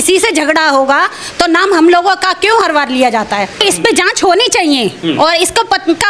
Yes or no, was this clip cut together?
yes